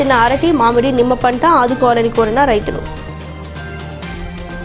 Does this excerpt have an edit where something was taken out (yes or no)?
no